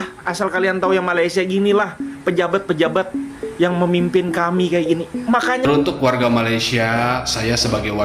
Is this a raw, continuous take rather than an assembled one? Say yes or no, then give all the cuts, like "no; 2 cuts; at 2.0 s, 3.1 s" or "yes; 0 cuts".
no; 1 cut; at 5.6 s